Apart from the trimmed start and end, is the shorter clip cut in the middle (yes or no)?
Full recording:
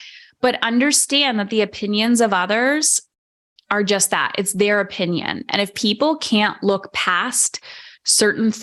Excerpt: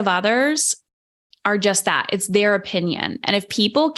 no